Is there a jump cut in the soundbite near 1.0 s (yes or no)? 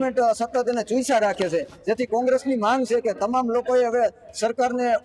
no